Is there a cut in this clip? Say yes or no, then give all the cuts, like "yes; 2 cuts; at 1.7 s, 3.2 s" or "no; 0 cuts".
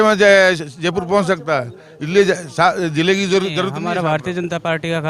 yes; 1 cut; at 3.8 s